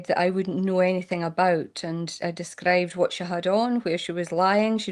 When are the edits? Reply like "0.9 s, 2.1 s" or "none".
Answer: none